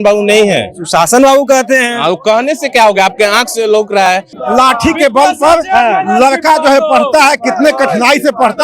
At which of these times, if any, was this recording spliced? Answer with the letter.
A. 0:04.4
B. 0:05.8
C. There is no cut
A